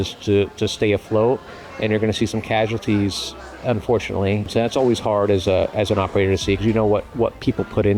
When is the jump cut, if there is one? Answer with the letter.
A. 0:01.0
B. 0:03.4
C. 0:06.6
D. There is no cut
D